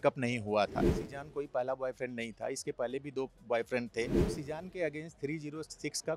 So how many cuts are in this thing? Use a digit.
2